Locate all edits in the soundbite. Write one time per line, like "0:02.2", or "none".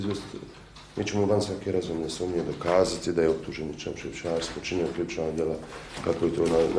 0:05.6